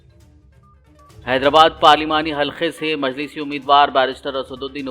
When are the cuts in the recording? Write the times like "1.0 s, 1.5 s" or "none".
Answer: 1.0 s